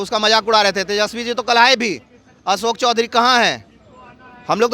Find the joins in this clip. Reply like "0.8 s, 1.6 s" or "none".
none